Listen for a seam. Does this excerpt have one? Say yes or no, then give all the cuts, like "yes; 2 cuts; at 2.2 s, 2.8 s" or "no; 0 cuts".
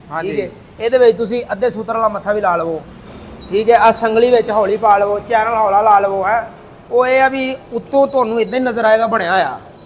no; 0 cuts